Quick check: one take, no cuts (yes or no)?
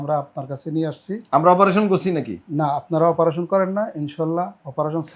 yes